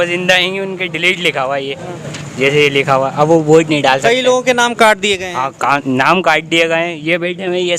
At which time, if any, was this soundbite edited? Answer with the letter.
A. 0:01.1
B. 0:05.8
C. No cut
C